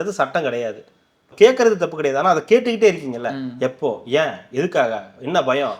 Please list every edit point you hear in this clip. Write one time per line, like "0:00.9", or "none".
0:01.3

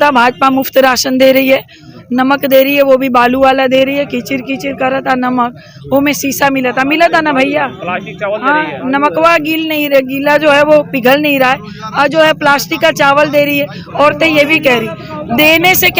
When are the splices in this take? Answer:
none

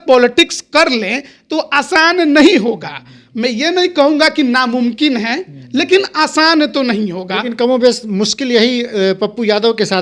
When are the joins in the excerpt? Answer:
none

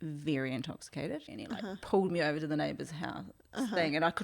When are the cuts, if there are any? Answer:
0:01.3

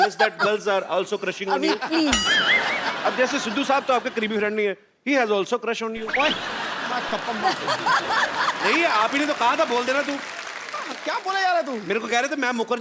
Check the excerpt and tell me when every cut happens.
none

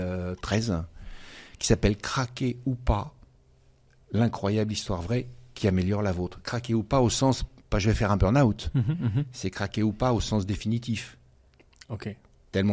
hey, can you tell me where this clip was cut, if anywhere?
none

